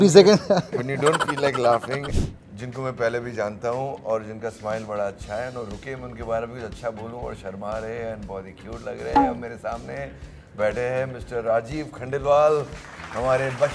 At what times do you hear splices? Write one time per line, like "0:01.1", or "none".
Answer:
0:02.1